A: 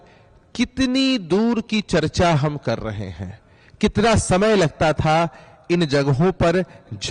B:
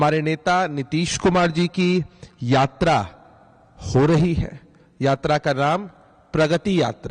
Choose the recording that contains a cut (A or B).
B